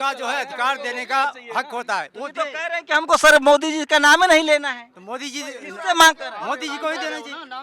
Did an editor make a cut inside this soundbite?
no; 0 cuts

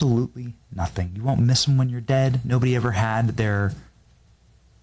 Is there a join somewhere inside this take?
no; 0 cuts

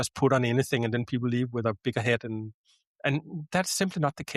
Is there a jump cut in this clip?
no; 0 cuts

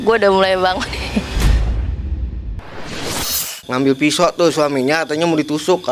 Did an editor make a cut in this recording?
yes; 2 cuts; at 1.3 s, 3.5 s

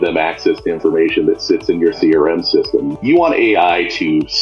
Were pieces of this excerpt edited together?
yes; 1 cut; at 2.9 s

